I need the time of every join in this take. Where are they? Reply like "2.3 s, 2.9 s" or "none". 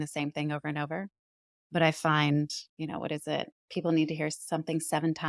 2.6 s